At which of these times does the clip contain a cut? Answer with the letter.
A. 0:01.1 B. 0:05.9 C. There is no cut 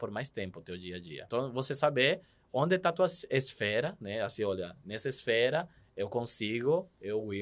A